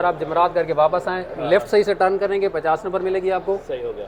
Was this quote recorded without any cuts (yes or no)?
yes